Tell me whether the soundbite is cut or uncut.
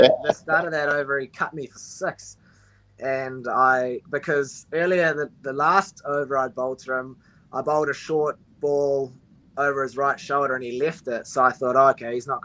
uncut